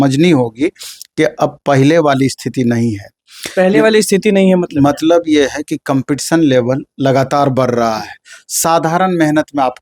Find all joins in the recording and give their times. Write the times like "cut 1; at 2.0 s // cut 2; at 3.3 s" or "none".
none